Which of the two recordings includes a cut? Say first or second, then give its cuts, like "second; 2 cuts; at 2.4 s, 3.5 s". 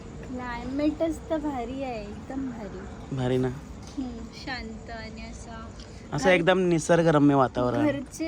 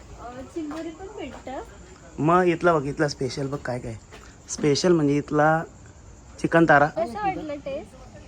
second; 1 cut; at 6.9 s